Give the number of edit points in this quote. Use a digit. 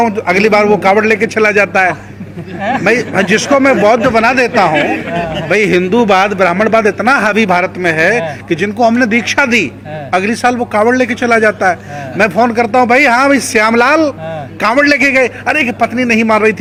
0